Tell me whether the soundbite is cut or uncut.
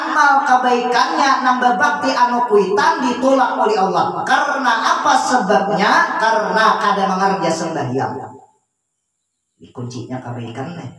uncut